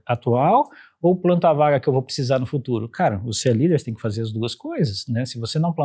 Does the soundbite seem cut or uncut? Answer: uncut